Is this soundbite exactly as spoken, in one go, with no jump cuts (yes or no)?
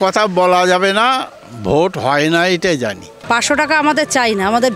no